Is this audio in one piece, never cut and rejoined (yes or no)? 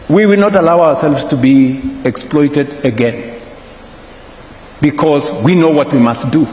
yes